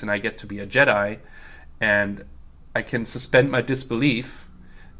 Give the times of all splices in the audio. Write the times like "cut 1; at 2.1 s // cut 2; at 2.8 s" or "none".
none